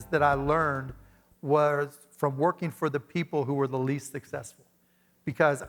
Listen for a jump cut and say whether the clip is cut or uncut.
uncut